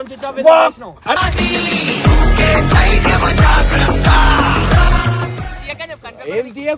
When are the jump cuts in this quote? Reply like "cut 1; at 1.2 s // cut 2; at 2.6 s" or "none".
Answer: cut 1; at 5.5 s